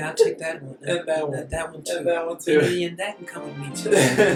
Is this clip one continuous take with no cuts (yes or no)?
yes